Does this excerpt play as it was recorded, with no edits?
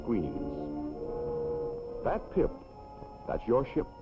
no; 1 cut; at 1.3 s

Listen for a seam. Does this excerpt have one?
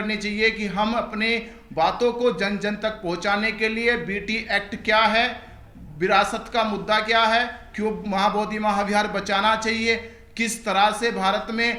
no; 0 cuts

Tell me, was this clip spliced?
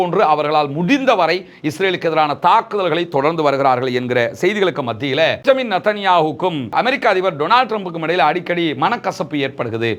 yes; 1 cut; at 5.4 s

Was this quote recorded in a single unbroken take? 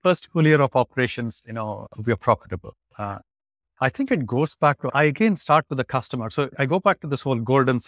no; 2 cuts; at 4.9 s, 6.5 s

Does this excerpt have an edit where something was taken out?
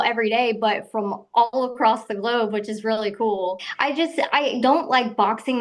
yes; 1 cut; at 3.7 s

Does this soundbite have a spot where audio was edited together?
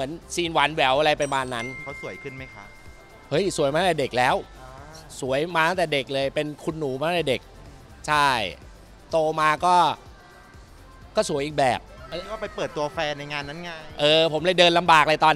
yes; 2 cuts; at 1.8 s, 12.1 s

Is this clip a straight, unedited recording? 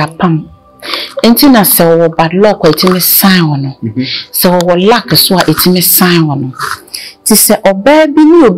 yes; 0 cuts

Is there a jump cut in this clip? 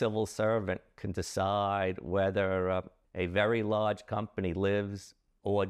yes; 1 cut; at 3.0 s

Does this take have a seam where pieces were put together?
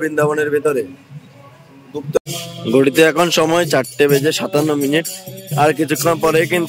yes; 1 cut; at 2.2 s

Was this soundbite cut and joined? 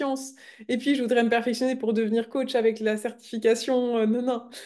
no; 0 cuts

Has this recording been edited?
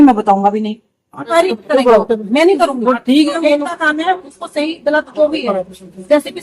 yes; 1 cut; at 1.3 s

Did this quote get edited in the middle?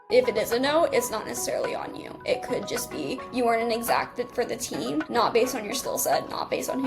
no; 0 cuts

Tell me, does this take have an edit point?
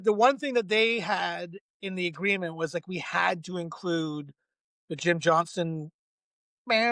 no; 0 cuts

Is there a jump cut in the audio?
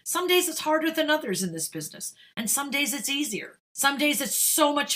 yes; 1 cut; at 3.6 s

